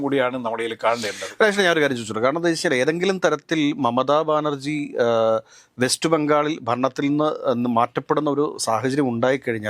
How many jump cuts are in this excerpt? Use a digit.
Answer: 0